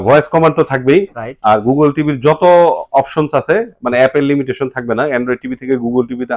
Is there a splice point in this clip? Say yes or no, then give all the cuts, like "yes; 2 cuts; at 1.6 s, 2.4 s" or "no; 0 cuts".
no; 0 cuts